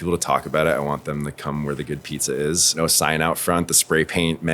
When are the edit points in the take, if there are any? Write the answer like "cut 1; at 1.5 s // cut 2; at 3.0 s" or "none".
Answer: cut 1; at 2.8 s